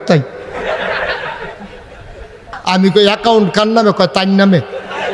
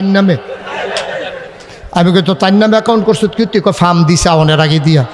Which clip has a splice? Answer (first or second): first